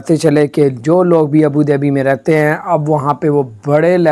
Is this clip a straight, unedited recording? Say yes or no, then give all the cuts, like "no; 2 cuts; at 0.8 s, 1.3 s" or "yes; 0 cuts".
yes; 0 cuts